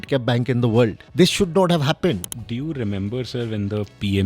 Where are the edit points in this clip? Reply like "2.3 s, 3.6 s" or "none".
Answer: 1.0 s, 2.3 s